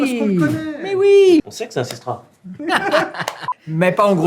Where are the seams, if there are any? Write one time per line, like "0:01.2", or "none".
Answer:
0:01.4